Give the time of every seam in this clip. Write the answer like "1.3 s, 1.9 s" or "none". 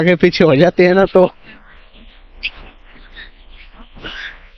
none